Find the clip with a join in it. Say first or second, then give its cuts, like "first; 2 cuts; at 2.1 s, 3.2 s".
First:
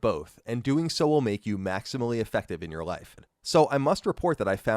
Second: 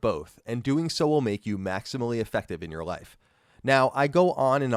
first; 1 cut; at 3.3 s